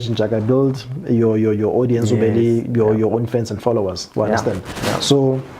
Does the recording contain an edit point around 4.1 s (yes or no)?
no